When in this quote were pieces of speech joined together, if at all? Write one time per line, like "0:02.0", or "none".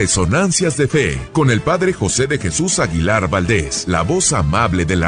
0:01.2
0:03.7